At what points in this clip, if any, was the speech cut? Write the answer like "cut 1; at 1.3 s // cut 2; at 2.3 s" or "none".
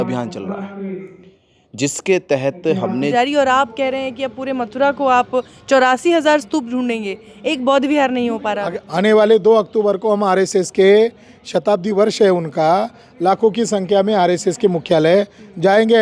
cut 1; at 3.1 s // cut 2; at 8.7 s